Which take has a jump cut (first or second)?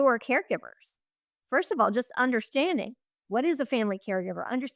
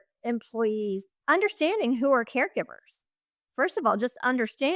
second